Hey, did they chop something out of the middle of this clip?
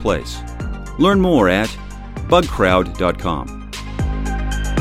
yes; 1 cut; at 3.7 s

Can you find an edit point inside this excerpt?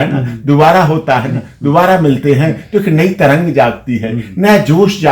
no; 0 cuts

